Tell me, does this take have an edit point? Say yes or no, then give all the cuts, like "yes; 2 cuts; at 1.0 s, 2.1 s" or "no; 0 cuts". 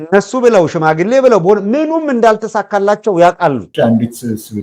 yes; 1 cut; at 3.7 s